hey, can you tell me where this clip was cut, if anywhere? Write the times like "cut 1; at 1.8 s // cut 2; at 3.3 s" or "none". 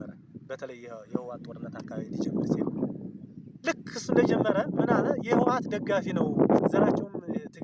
cut 1; at 6.6 s